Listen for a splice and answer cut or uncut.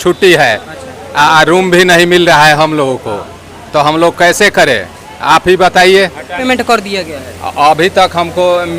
cut